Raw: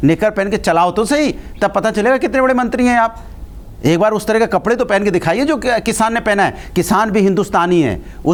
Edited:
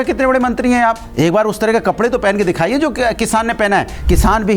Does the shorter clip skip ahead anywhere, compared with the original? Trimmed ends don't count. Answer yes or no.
yes